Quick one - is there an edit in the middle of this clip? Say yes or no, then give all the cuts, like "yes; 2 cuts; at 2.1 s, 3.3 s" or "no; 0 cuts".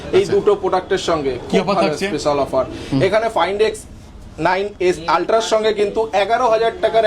no; 0 cuts